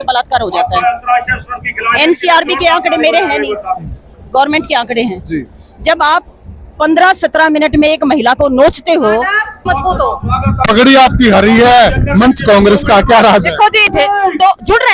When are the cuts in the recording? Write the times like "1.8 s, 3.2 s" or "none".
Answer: 9.6 s, 13.9 s